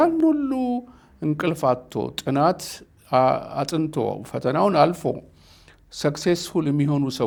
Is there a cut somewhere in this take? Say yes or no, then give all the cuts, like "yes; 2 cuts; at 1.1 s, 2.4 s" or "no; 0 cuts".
no; 0 cuts